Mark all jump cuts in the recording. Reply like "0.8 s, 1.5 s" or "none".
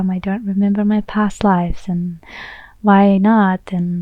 none